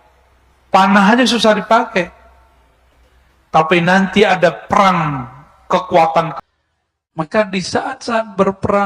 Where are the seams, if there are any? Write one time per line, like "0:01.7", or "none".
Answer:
0:06.4